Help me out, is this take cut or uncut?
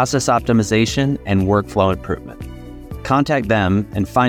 uncut